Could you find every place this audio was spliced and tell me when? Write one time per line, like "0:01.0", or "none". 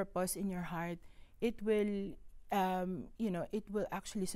none